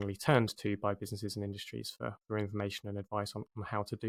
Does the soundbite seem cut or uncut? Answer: uncut